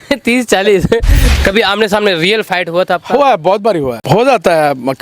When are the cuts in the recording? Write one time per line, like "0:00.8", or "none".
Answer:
0:01.2
0:04.0

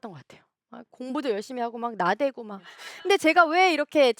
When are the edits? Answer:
0:02.8

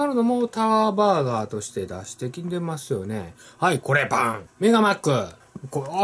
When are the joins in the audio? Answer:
none

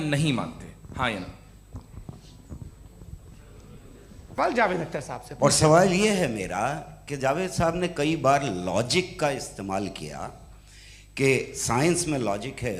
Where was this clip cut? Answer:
0:04.4

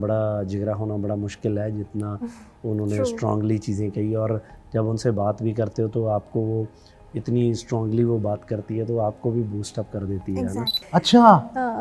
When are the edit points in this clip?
0:10.8

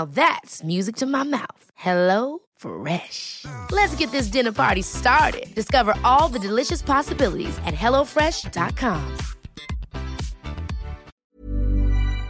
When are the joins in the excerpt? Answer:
0:11.1

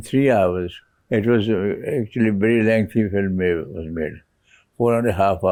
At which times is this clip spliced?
none

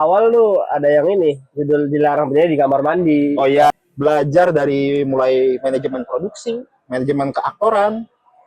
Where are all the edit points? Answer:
0:03.7

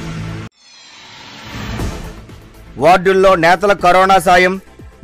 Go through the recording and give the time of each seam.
0:02.1

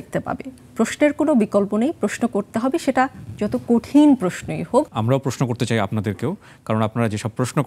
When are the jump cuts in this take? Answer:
0:04.9

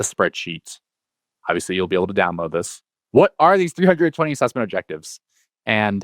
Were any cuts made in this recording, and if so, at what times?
0:02.9

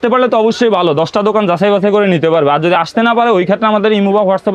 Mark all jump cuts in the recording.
none

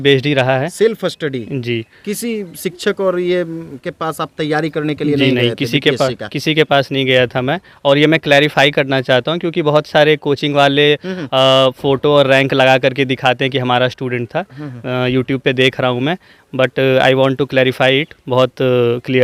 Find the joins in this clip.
none

